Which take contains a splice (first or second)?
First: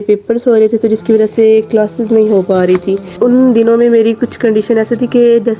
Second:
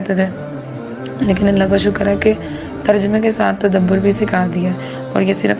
first